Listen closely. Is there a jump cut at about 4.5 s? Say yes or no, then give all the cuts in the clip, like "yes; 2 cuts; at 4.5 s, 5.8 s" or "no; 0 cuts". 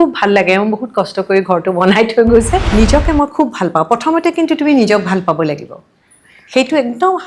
no; 1 cut; at 2.7 s